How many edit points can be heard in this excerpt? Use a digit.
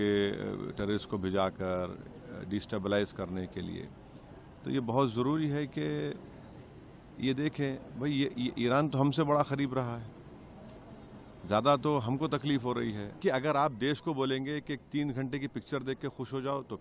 1